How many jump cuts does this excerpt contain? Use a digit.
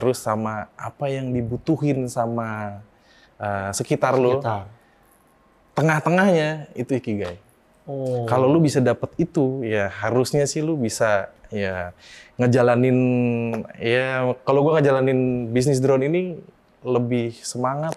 0